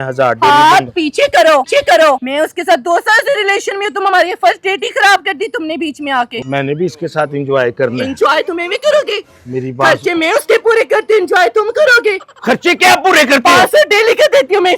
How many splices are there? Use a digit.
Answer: 2